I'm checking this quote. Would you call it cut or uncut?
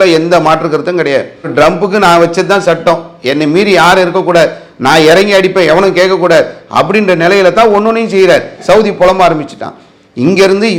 cut